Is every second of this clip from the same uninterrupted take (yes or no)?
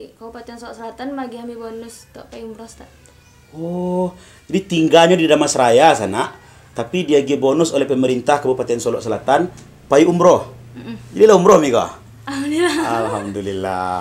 yes